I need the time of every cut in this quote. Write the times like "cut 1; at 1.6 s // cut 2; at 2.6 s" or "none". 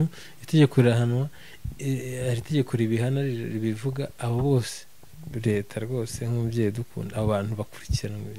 none